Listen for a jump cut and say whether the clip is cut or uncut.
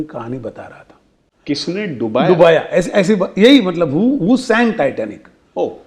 cut